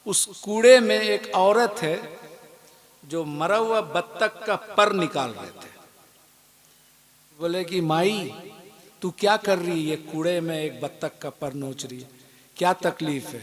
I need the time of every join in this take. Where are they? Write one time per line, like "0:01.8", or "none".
0:07.4